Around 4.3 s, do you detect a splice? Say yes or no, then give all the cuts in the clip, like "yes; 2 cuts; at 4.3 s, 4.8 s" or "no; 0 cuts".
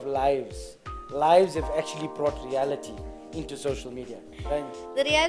yes; 1 cut; at 4.3 s